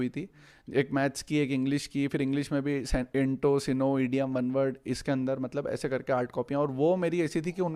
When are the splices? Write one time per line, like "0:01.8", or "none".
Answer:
none